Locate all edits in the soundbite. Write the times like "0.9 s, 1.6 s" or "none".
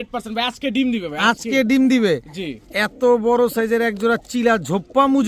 none